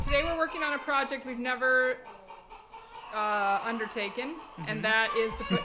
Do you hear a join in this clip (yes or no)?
no